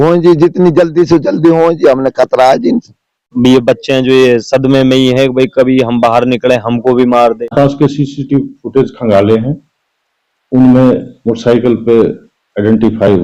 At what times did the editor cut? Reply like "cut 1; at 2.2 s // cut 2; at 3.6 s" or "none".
cut 1; at 3.3 s // cut 2; at 7.5 s

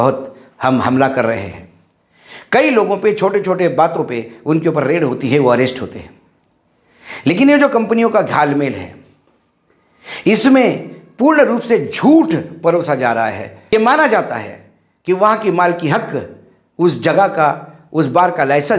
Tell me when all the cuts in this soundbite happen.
cut 1; at 13.7 s

